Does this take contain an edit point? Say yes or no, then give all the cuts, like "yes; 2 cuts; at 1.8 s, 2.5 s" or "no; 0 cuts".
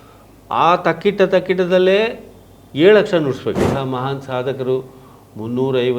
yes; 1 cut; at 3.7 s